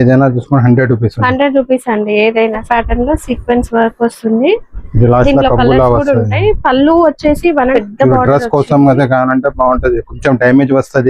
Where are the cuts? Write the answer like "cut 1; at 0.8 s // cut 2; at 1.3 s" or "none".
cut 1; at 2.6 s // cut 2; at 7.7 s